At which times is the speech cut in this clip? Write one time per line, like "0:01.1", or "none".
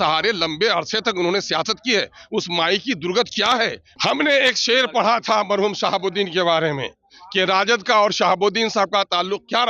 0:03.9